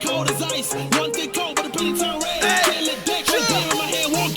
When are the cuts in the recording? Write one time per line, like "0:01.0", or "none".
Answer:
0:02.3